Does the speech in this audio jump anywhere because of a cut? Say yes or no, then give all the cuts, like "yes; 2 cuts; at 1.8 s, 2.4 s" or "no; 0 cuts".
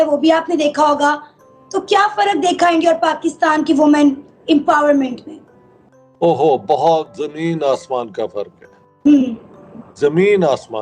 no; 0 cuts